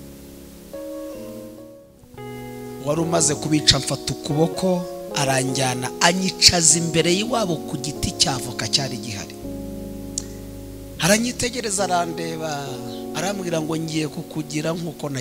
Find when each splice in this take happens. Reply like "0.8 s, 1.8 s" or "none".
1.8 s